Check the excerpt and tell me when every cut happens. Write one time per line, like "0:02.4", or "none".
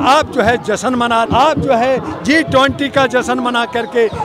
0:01.3